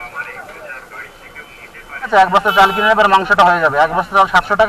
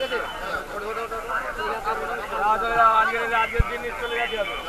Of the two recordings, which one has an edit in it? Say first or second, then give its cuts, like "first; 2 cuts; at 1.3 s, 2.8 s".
first; 1 cut; at 2.1 s